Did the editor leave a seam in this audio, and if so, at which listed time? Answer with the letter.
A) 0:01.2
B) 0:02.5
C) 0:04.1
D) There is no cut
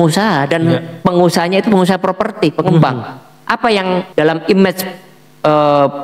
C